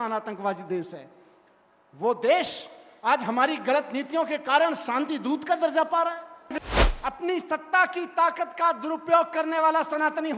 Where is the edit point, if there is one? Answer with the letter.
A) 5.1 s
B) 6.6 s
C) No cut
B